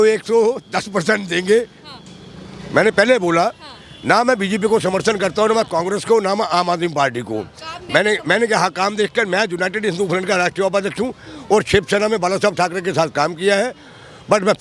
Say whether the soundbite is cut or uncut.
uncut